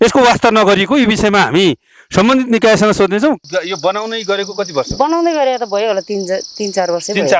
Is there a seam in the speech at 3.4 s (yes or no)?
yes